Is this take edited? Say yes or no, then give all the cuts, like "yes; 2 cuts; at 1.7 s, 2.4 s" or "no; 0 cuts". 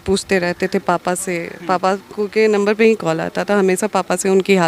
no; 0 cuts